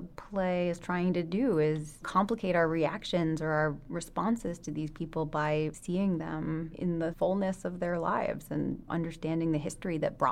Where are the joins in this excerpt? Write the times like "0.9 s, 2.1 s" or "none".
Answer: 2.0 s, 5.8 s, 7.1 s, 8.9 s